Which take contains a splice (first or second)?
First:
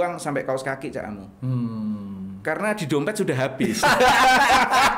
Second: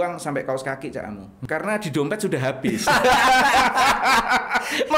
second